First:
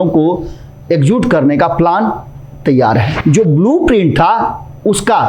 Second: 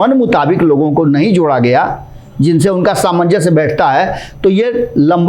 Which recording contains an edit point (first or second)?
first